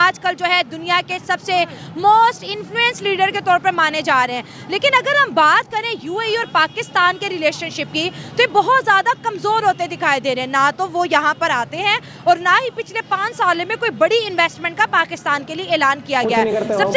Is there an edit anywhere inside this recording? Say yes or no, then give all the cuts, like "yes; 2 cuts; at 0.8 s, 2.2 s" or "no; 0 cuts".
no; 0 cuts